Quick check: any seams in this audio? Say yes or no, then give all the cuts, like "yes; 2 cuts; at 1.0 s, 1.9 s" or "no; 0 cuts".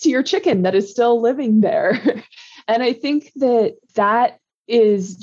no; 0 cuts